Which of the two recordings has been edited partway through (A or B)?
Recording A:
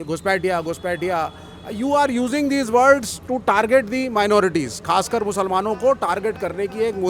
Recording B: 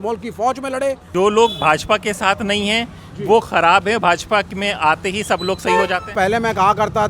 B